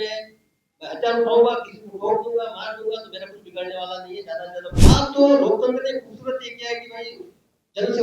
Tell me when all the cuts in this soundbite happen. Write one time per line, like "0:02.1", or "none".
0:04.8